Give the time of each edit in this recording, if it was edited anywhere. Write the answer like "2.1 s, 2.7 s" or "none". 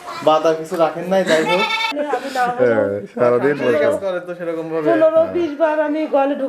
1.9 s